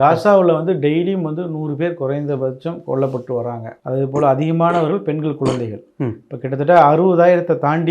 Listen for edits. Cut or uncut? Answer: uncut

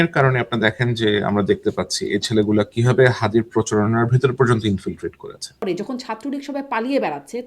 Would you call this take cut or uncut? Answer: cut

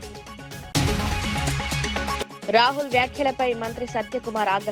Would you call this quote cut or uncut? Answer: cut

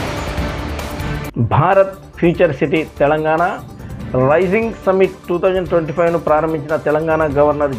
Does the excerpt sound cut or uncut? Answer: cut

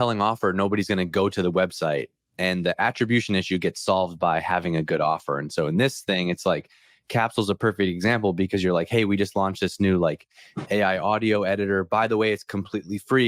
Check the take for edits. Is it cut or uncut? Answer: uncut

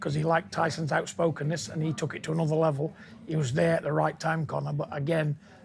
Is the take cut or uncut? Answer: uncut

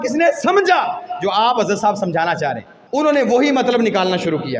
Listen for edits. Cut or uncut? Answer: cut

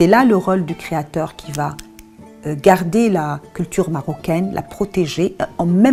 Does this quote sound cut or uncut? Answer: uncut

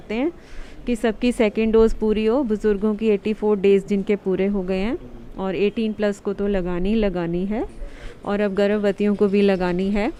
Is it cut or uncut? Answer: uncut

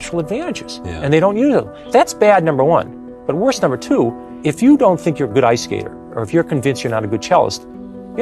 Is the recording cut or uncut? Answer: cut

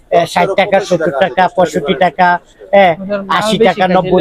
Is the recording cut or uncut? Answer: uncut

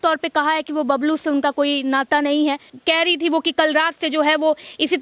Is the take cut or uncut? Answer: cut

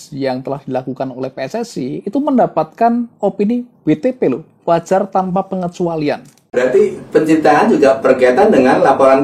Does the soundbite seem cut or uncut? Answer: cut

